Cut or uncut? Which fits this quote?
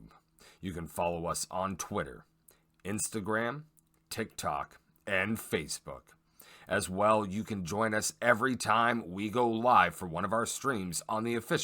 cut